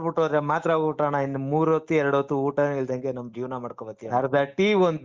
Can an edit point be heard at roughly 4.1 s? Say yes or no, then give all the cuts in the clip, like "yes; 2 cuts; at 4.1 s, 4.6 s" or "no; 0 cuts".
yes; 1 cut; at 4.1 s